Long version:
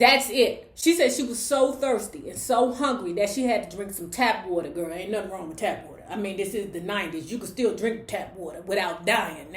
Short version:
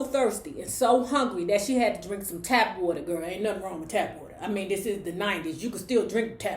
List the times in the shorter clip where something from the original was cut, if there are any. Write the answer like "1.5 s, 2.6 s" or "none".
none